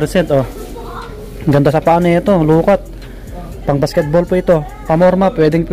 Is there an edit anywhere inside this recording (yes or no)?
no